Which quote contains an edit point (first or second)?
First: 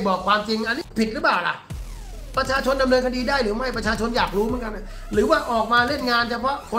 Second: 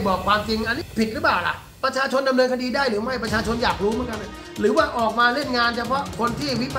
second